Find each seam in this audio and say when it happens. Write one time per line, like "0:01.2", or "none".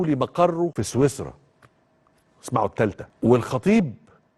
0:00.7
0:03.1